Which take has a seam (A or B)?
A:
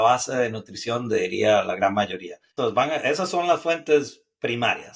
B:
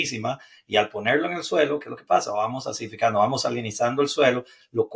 A